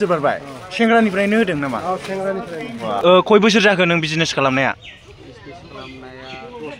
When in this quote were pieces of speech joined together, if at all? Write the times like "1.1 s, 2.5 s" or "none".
3.0 s